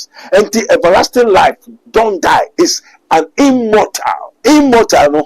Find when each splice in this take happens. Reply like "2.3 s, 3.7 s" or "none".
4.3 s